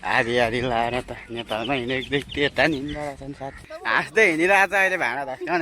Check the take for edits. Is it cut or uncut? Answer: cut